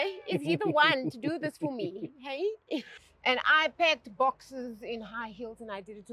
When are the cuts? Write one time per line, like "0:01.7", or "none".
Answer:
0:03.0